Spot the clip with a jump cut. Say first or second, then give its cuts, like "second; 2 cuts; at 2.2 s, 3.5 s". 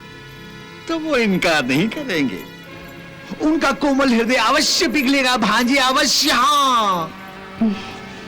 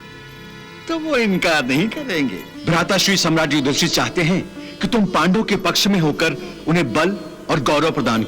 second; 1 cut; at 2.5 s